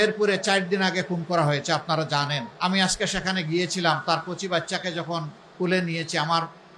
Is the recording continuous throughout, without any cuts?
no; 1 cut; at 2.5 s

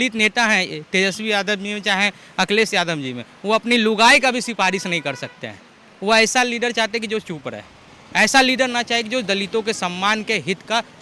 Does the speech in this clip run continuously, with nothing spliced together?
yes; 0 cuts

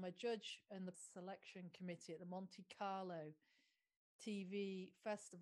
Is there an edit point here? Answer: yes; 1 cut; at 1.0 s

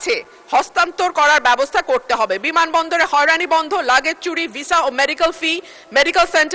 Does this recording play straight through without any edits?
yes; 0 cuts

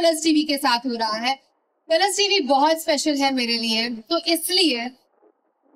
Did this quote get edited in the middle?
no; 0 cuts

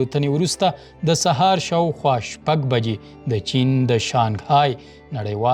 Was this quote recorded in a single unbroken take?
yes; 0 cuts

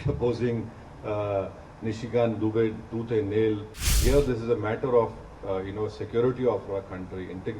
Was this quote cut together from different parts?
yes; 1 cut; at 3.9 s

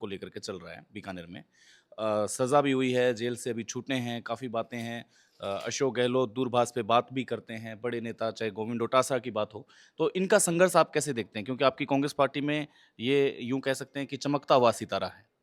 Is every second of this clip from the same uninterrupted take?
yes; 0 cuts

